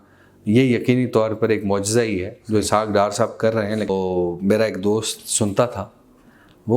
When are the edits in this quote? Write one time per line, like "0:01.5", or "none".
0:03.9